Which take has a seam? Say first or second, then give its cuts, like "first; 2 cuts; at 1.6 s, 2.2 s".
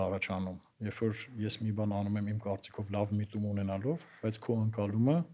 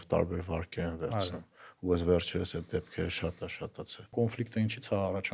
second; 1 cut; at 4.1 s